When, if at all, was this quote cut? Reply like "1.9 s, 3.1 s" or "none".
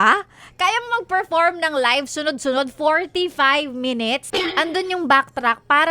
4.3 s